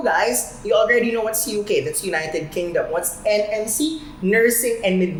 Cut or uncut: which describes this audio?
uncut